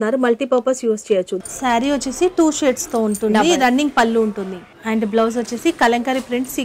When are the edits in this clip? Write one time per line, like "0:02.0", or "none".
0:01.3
0:04.7